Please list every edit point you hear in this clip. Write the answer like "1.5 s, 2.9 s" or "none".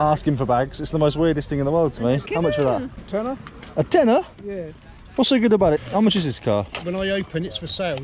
2.3 s, 3.0 s, 5.8 s